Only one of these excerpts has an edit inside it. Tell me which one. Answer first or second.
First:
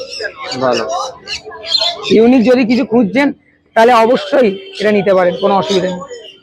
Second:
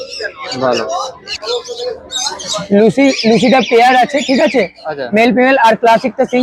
second